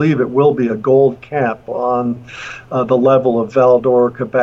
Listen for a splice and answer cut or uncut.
uncut